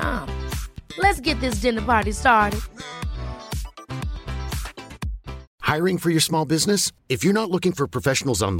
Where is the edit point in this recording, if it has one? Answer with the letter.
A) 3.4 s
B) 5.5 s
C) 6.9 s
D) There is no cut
B